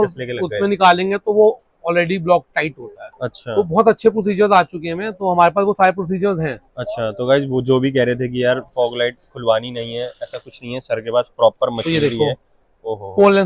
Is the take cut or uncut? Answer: uncut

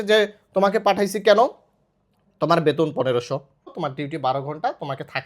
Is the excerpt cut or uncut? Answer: cut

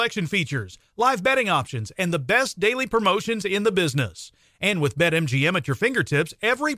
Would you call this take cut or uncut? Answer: uncut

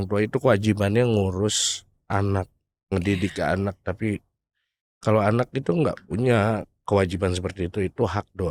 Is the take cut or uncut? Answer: uncut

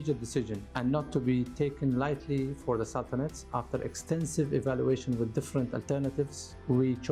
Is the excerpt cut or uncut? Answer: uncut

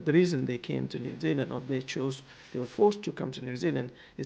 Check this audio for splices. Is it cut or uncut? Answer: uncut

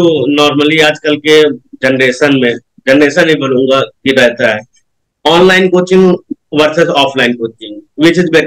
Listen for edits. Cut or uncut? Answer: uncut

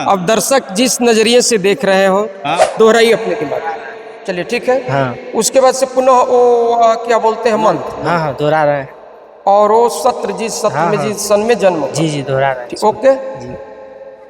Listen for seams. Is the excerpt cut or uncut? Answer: cut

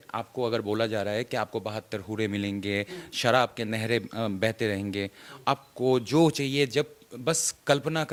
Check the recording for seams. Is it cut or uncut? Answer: uncut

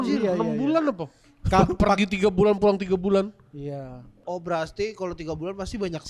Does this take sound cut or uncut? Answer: cut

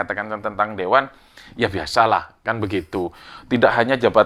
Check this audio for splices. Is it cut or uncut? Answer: uncut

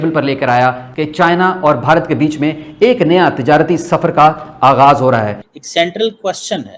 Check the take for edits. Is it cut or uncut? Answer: cut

